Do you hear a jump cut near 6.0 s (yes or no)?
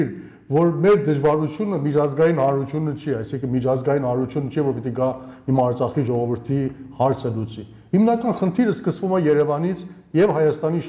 no